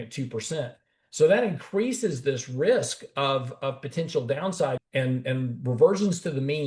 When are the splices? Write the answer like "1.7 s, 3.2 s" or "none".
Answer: 4.8 s